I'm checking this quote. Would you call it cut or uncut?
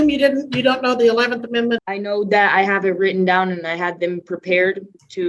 cut